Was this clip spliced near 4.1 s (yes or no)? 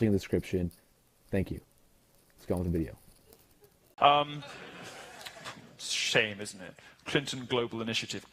yes